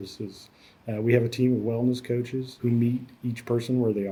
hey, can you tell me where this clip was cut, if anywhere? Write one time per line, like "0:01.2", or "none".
none